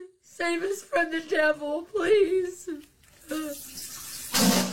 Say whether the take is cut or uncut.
uncut